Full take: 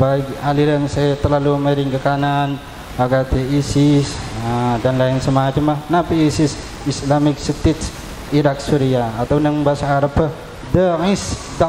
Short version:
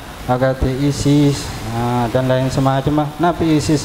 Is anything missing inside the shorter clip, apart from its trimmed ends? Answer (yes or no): no